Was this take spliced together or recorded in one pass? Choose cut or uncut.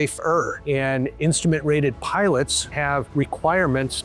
cut